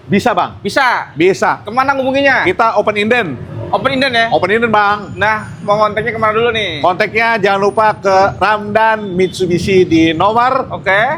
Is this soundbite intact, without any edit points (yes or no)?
yes